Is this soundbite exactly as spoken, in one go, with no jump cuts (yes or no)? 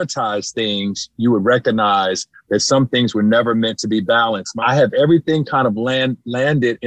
no